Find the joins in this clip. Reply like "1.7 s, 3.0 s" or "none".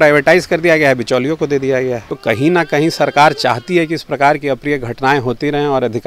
2.1 s